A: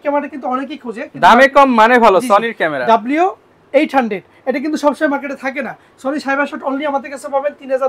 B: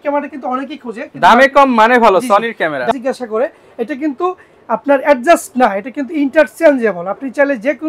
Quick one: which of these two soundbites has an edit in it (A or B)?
B